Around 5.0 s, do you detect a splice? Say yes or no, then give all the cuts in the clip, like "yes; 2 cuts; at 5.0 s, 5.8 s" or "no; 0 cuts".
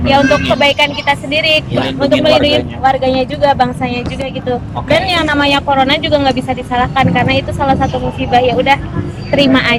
no; 0 cuts